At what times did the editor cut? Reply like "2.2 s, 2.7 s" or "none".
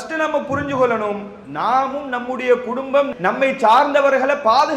3.1 s